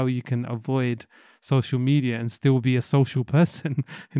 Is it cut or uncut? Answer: uncut